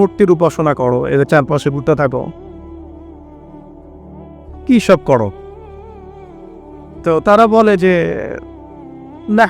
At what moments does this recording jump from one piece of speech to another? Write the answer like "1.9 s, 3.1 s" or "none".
5.3 s, 6.8 s